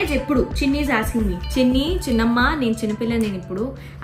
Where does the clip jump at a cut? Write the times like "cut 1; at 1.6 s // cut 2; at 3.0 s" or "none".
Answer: none